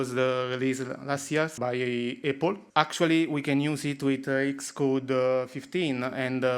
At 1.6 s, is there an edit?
yes; 2 cuts; at 1.6 s, 2.6 s

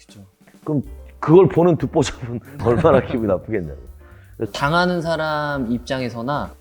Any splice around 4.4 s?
yes; 1 cut; at 4.4 s

